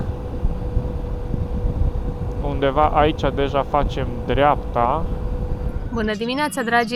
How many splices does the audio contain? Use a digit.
1